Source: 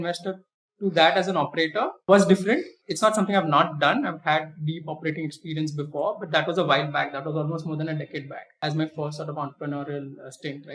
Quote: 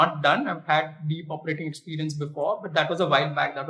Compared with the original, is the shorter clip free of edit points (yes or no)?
yes